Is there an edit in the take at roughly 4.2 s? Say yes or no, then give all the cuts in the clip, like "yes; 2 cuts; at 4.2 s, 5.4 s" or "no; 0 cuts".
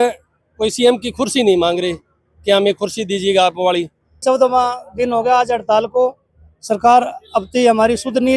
yes; 1 cut; at 4.2 s